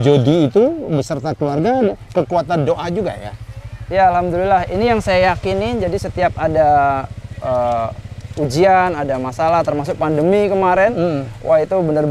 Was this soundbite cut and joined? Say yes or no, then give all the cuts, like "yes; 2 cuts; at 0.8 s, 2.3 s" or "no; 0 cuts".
no; 0 cuts